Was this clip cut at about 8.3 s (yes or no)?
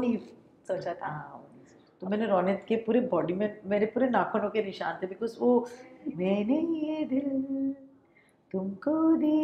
no